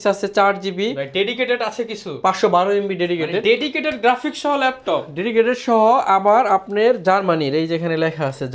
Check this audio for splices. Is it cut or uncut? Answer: uncut